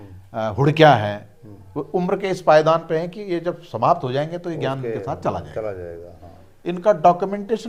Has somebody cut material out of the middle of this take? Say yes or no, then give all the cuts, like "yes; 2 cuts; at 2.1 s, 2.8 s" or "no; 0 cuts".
no; 0 cuts